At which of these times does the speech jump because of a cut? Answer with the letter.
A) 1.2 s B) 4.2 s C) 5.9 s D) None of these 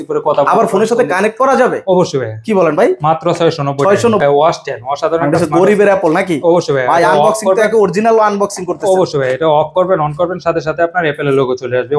B